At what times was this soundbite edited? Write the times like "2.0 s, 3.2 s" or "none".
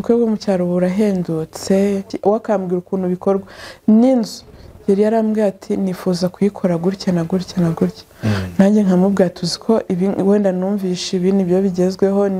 2.1 s